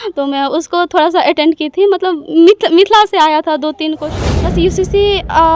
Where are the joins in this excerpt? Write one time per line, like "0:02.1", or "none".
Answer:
0:04.0

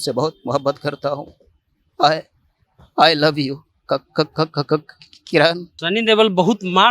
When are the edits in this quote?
0:05.7

